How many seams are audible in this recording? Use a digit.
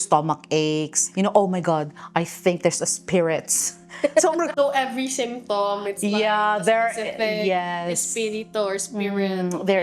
2